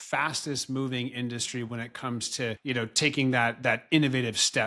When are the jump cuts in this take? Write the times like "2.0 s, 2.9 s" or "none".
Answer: 2.6 s